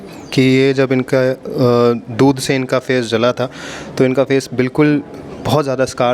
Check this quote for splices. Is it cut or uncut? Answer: uncut